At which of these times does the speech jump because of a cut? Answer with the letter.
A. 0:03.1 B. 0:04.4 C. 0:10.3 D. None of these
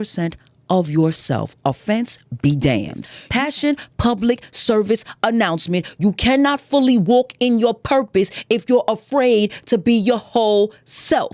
A